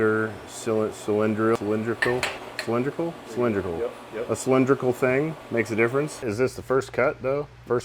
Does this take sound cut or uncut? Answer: cut